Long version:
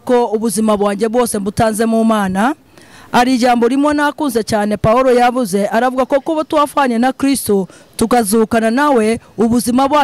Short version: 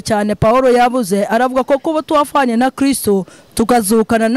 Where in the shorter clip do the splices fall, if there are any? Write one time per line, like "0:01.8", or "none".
none